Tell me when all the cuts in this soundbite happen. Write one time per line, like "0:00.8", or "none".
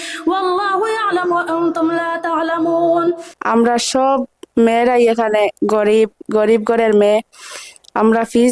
0:03.3